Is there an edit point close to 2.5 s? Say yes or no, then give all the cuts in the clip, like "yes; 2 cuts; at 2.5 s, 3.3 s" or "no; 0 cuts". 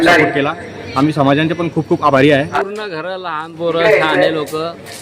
yes; 1 cut; at 2.5 s